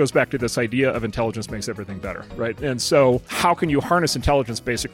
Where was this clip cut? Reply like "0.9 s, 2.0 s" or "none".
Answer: 2.6 s, 3.3 s